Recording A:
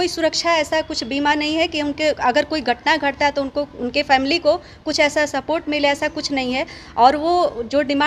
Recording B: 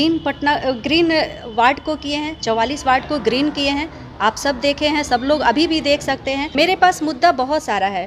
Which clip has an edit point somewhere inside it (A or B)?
B